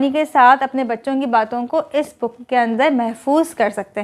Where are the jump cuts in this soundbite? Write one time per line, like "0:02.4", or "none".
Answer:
none

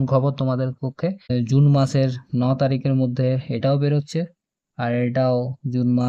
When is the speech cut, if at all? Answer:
0:01.3

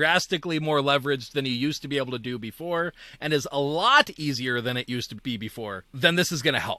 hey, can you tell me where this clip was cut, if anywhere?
0:05.8

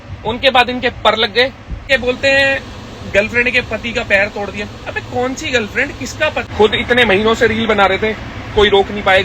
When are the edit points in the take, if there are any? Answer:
0:01.9
0:06.5

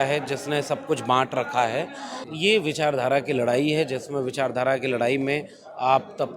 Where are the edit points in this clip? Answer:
0:02.2

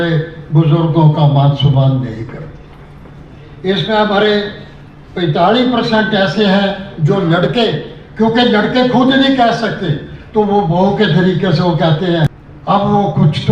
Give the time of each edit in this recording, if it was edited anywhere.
0:12.4

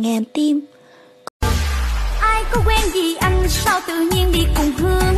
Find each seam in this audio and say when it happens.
0:01.3

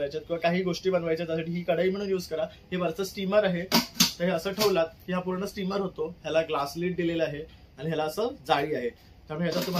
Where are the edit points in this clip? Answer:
none

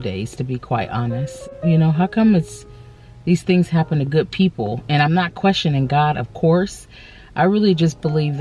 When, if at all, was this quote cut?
0:01.4

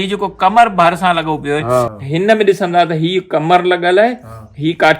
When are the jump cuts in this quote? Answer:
0:02.0

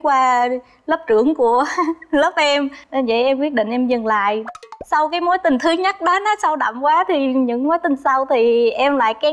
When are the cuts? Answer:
none

